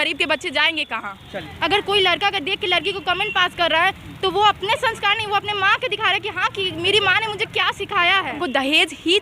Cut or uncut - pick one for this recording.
cut